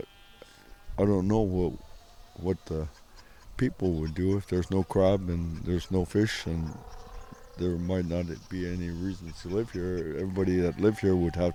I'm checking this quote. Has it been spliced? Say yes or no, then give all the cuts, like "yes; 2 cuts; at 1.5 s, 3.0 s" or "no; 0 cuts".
no; 0 cuts